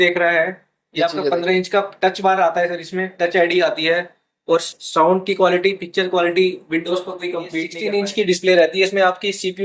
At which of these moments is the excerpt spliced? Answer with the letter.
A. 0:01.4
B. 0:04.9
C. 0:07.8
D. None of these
C